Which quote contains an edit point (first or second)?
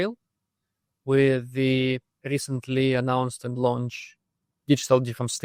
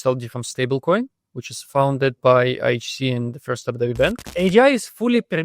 second